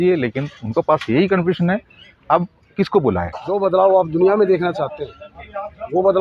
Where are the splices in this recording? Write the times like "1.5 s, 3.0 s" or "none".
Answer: 3.4 s